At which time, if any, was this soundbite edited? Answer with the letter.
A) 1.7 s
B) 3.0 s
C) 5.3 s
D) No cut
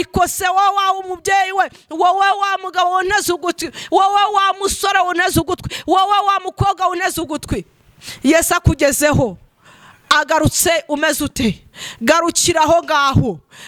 D